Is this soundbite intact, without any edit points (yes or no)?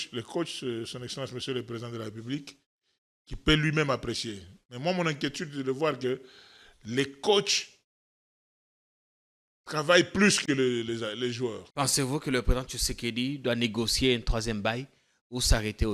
no